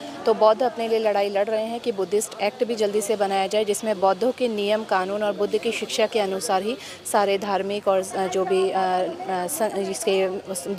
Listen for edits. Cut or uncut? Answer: uncut